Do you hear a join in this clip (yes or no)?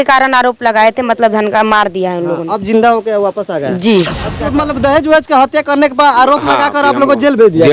yes